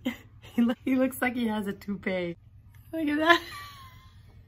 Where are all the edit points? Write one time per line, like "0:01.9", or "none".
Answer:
0:00.8
0:02.5